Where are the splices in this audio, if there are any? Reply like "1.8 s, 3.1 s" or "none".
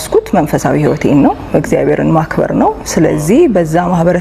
none